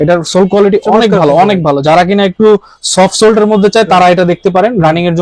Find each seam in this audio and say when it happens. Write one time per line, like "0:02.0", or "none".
none